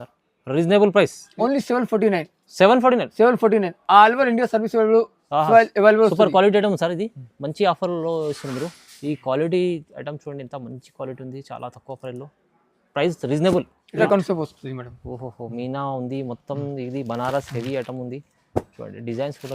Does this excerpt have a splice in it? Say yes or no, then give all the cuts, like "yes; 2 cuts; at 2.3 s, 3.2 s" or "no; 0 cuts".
yes; 2 cuts; at 1.2 s, 14.0 s